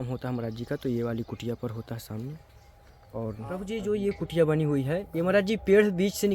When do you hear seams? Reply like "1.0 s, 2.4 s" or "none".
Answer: 3.6 s